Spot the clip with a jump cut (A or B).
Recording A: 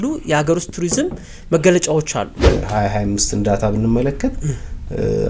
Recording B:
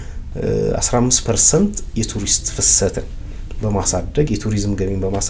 A